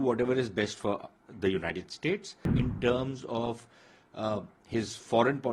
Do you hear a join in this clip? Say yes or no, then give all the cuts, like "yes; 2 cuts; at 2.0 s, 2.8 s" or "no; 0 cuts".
yes; 1 cut; at 2.4 s